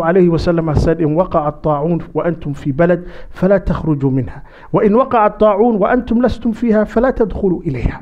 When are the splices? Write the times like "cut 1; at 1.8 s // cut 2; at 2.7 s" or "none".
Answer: none